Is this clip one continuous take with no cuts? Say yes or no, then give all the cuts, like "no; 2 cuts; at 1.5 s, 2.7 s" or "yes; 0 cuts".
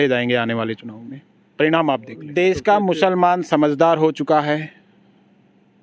no; 1 cut; at 2.2 s